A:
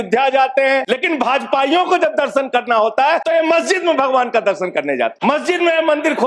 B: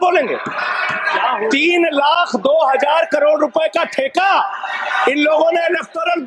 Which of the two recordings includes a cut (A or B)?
A